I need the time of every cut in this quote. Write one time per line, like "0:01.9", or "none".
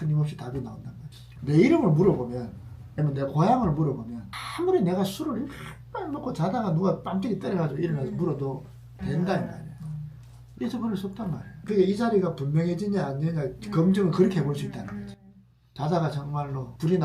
0:01.3
0:10.4
0:11.5
0:15.6